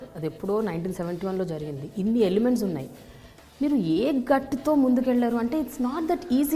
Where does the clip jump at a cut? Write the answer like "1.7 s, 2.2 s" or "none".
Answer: none